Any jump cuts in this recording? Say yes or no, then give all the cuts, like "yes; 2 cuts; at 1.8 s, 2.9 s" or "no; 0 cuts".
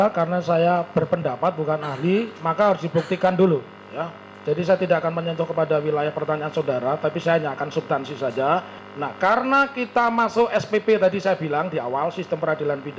yes; 1 cut; at 8.8 s